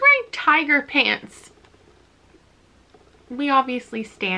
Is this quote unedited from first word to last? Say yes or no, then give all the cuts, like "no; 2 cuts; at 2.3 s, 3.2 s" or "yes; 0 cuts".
yes; 0 cuts